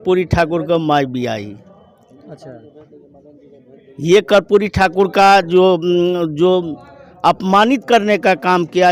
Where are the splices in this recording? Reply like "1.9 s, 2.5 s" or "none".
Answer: none